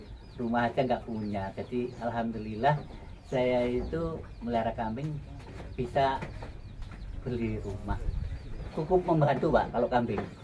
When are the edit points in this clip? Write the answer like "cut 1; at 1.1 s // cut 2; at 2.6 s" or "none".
cut 1; at 8.5 s